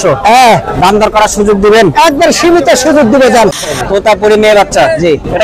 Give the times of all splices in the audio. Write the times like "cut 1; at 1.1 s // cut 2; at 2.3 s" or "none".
cut 1; at 3.6 s